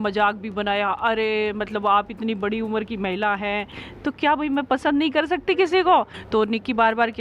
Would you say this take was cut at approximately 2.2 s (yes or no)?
no